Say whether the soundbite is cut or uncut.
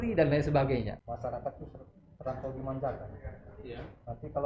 cut